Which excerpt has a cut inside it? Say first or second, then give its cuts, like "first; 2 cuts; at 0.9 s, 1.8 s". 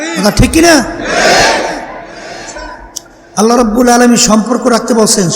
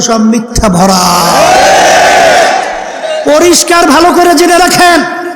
first; 1 cut; at 2.6 s